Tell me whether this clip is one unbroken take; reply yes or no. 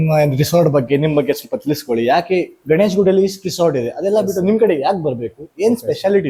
yes